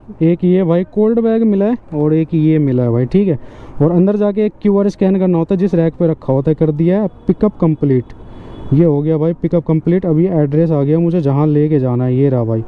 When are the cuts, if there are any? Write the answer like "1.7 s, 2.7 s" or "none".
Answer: none